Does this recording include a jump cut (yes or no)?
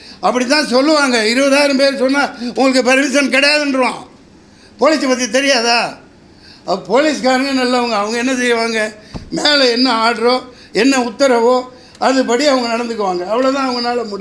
no